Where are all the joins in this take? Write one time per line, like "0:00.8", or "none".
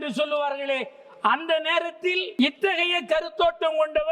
0:02.3